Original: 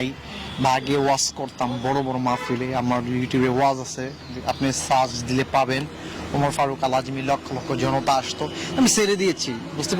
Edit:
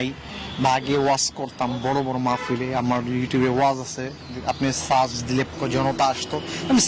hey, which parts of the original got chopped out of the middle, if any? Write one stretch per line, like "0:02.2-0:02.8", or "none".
0:05.5-0:07.6